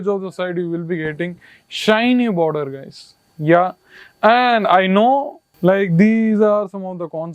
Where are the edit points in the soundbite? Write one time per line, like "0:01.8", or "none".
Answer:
0:05.4